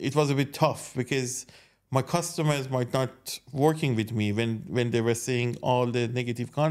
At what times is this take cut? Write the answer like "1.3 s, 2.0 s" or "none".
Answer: none